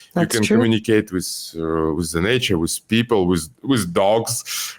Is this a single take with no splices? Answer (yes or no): yes